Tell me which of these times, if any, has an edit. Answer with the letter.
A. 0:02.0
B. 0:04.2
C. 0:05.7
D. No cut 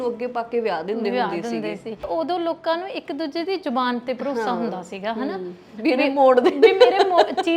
A